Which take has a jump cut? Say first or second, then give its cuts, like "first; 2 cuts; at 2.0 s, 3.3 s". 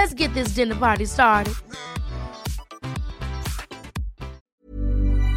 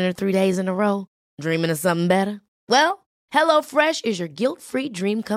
first; 1 cut; at 4.4 s